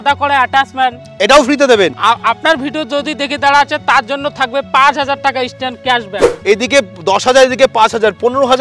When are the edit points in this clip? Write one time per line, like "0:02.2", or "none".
0:02.0
0:06.3